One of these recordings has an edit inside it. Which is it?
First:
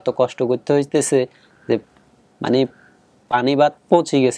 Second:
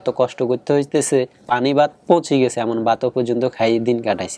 second; 1 cut; at 1.4 s

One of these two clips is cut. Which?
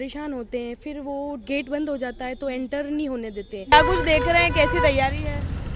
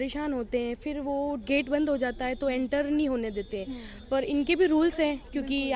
first; 1 cut; at 3.7 s

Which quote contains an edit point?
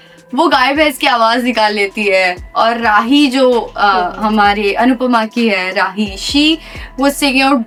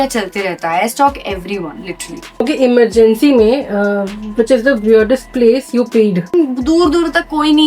second; 2 cuts; at 2.2 s, 6.3 s

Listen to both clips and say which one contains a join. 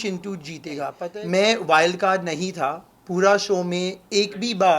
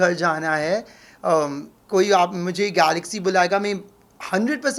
first; 1 cut; at 1.0 s

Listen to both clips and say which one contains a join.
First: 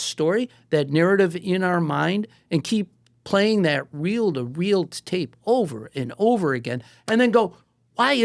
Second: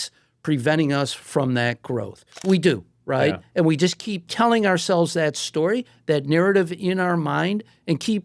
second; 2 cuts; at 2.4 s, 4.2 s

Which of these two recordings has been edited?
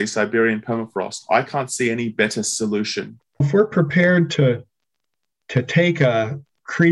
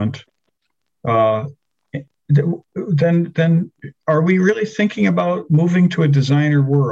first; 1 cut; at 3.4 s

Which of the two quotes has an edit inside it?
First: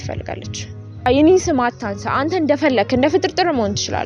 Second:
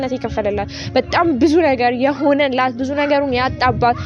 first; 1 cut; at 1.0 s

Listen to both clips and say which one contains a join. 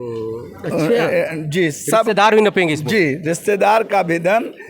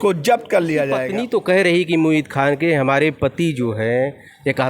second; 1 cut; at 1.0 s

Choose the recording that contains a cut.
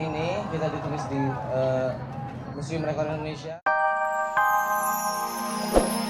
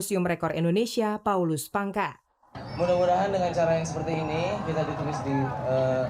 first; 1 cut; at 3.4 s

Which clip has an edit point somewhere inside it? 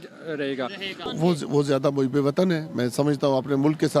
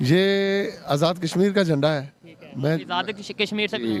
first; 1 cut; at 1.1 s

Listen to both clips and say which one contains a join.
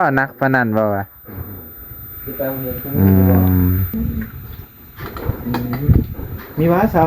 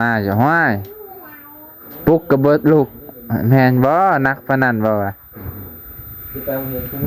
first; 1 cut; at 3.9 s

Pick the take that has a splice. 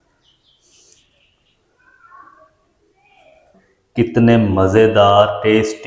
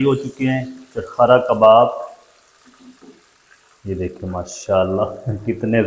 first; 1 cut; at 3.5 s

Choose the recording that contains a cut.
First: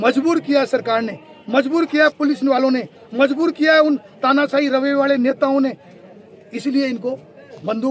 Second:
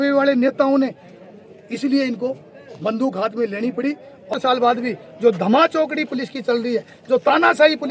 second; 1 cut; at 4.3 s

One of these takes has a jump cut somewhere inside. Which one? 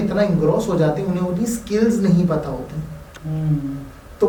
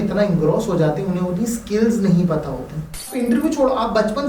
second; 1 cut; at 3.1 s

